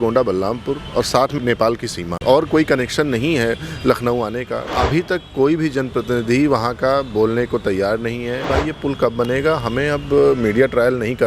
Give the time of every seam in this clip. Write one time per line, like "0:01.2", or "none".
0:02.1
0:04.7
0:08.5